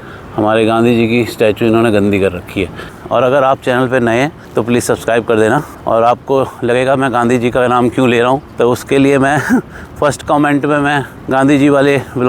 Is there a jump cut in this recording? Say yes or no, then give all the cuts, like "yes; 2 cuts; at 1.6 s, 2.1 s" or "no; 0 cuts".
no; 0 cuts